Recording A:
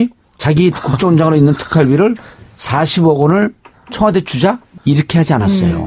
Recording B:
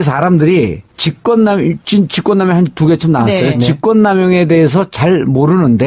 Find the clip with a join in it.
B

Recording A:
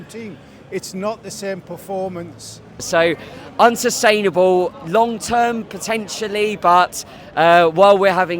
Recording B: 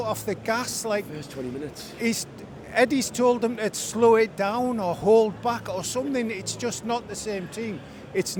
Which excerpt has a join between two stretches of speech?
A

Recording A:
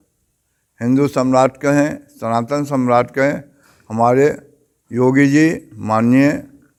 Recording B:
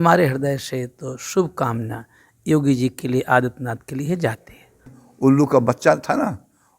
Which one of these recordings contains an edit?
B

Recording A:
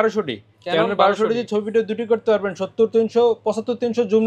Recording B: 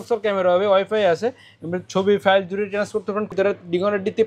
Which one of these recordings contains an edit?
B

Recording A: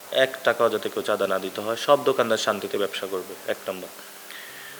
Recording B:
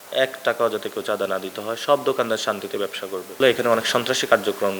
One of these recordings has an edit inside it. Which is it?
B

